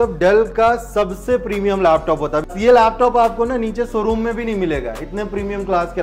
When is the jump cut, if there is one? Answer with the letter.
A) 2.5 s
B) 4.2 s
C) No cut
A